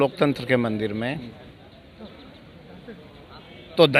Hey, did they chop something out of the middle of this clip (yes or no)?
no